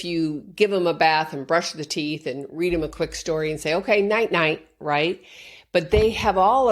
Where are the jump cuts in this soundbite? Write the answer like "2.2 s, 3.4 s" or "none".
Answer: none